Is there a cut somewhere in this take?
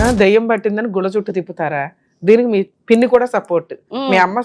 yes; 1 cut; at 2.7 s

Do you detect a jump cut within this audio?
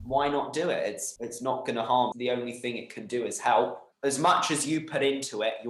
yes; 3 cuts; at 1.1 s, 2.1 s, 3.9 s

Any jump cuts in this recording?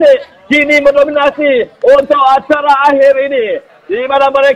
no; 0 cuts

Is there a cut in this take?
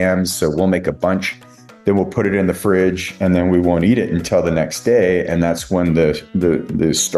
no; 0 cuts

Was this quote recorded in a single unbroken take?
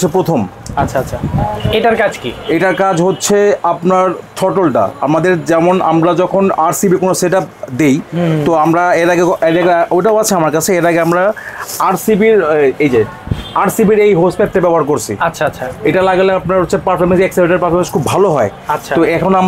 yes; 0 cuts

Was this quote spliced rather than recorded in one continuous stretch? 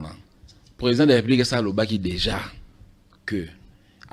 no; 0 cuts

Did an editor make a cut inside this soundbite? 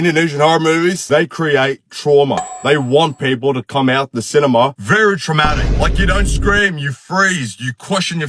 no; 0 cuts

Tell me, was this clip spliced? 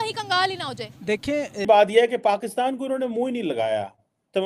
yes; 1 cut; at 1.6 s

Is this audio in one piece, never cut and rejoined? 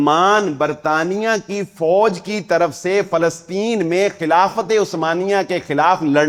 yes; 0 cuts

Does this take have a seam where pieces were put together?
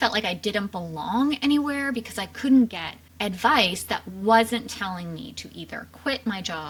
no; 0 cuts

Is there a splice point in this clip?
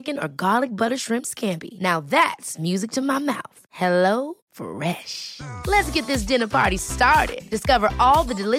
no; 0 cuts

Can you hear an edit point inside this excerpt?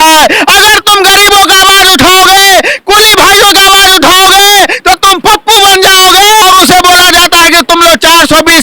yes; 1 cut; at 6.4 s

